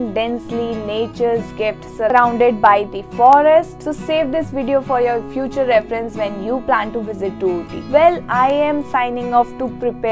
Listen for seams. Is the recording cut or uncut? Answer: uncut